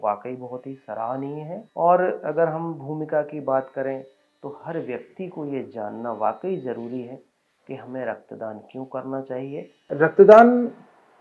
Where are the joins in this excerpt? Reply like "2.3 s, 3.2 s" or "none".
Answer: 1.6 s, 9.9 s